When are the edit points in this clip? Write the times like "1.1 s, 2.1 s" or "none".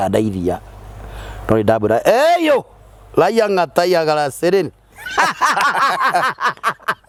none